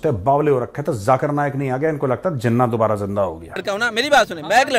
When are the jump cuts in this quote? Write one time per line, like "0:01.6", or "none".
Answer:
0:03.6

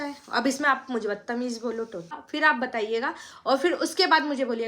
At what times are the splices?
0:02.2

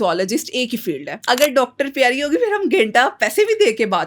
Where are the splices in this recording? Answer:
0:01.1

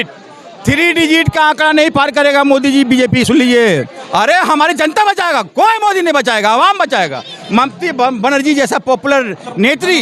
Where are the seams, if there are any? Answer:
0:04.0
0:07.4

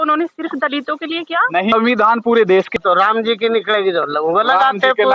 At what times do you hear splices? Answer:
0:02.7

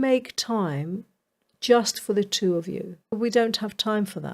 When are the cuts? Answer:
0:03.2

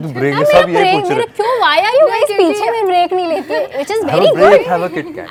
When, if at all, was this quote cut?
none

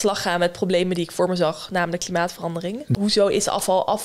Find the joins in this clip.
0:02.9

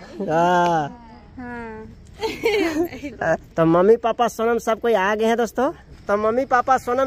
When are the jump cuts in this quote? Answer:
0:01.3
0:03.5
0:05.9

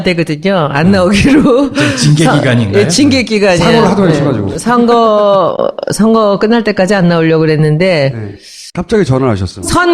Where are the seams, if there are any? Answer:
0:03.0

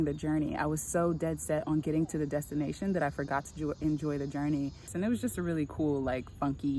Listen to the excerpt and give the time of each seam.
0:04.9

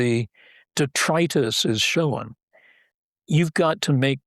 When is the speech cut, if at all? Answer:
0:03.0

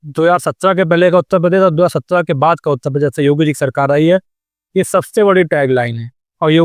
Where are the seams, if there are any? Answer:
none

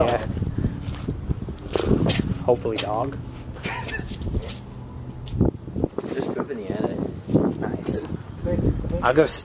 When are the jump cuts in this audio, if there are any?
none

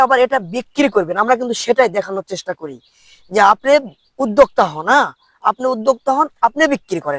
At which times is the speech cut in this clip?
none

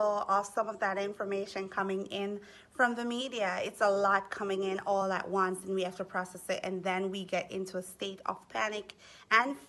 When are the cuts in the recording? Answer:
none

